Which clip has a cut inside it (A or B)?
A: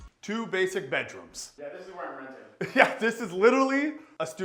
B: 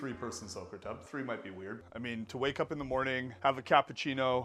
B